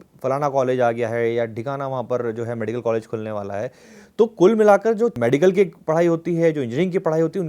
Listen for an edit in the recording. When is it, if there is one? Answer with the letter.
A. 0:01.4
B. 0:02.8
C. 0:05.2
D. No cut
C